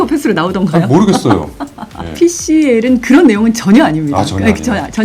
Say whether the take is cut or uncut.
cut